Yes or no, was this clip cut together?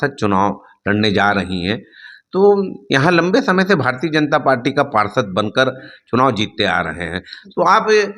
no